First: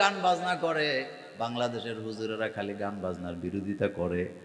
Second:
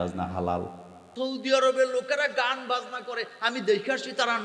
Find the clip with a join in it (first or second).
second